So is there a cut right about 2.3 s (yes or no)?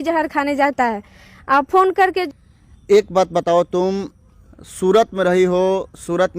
yes